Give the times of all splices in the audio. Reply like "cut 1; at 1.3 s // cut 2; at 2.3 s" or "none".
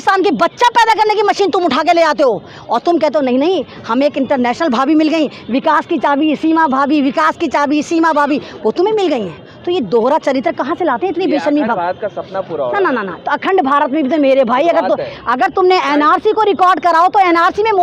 none